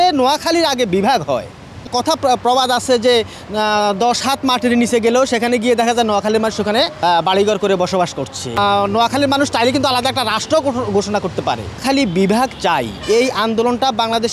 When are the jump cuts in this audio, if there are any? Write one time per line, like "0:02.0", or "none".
0:01.9
0:07.0
0:08.6
0:11.8